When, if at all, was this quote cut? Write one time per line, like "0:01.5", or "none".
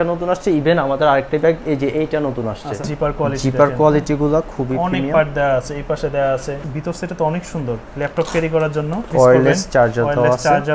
0:02.9
0:06.6
0:09.1